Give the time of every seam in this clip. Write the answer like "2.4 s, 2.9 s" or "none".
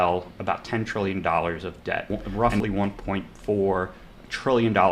2.1 s